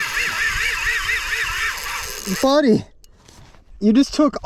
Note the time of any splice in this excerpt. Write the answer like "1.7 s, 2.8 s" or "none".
none